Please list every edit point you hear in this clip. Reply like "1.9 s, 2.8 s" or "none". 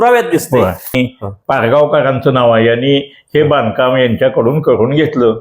0.9 s